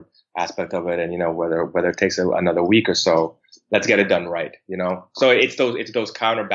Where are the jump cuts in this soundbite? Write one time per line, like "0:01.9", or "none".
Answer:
none

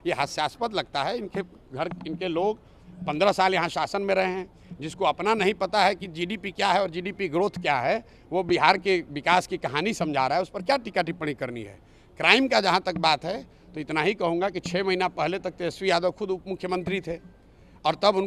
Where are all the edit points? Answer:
none

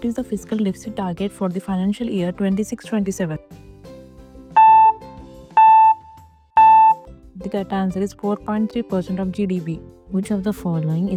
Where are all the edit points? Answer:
none

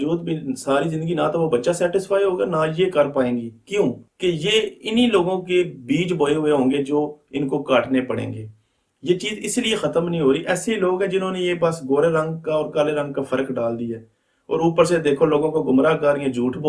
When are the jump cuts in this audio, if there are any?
0:04.1

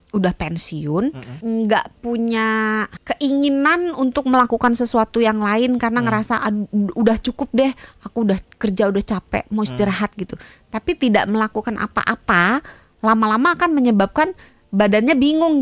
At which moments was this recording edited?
0:01.3
0:03.0

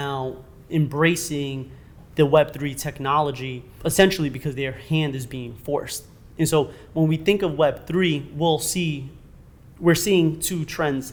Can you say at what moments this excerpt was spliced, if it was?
none

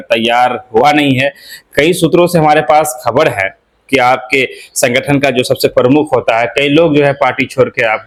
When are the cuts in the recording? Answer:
none

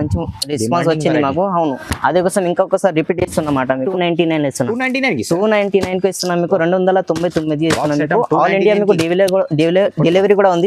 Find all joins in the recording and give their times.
0:03.9

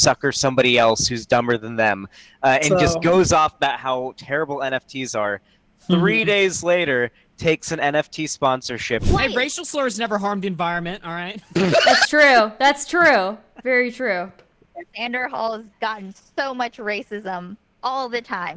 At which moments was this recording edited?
0:09.0

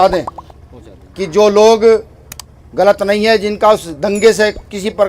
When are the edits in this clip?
0:03.9

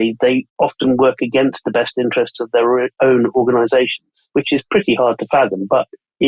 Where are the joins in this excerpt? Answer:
none

